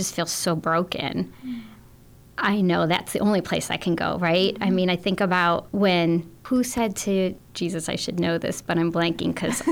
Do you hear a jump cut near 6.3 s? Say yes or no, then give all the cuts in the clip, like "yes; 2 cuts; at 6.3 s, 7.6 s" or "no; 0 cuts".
yes; 3 cuts; at 5.7 s, 6.3 s, 7.4 s